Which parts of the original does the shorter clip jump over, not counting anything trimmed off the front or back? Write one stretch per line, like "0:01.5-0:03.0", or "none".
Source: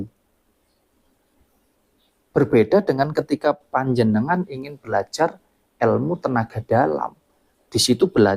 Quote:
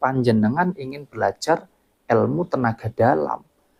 none